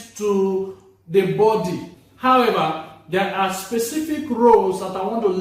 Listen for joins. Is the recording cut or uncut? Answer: cut